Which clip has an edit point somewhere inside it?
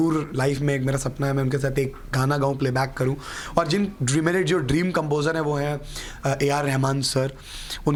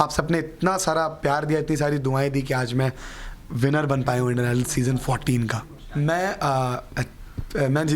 second; 1 cut; at 5.8 s

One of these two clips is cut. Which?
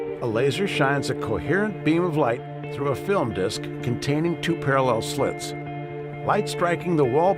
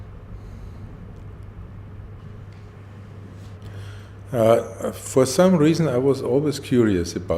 first; 1 cut; at 2.0 s

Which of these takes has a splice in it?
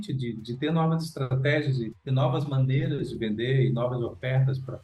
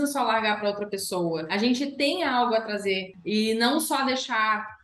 second; 2 cuts; at 1.5 s, 3.1 s

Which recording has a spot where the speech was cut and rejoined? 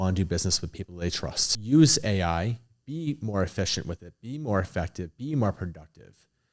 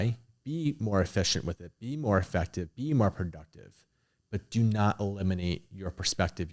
first; 1 cut; at 1.5 s

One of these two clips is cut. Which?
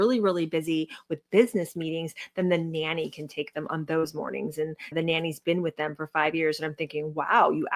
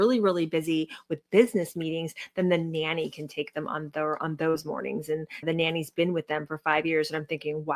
first; 1 cut; at 3.7 s

